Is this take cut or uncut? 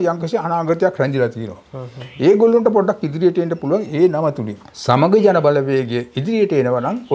uncut